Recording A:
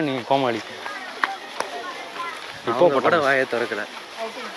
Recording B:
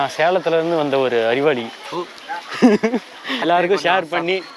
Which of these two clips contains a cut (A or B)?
B